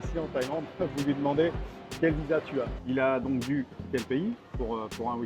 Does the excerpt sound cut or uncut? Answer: cut